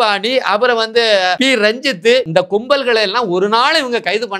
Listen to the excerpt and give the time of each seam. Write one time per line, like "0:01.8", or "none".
0:01.4
0:02.3